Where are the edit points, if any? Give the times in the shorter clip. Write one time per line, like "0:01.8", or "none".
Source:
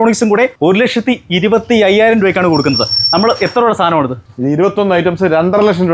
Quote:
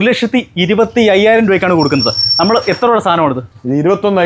none